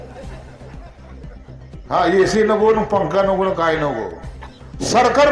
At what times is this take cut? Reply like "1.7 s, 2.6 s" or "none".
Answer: none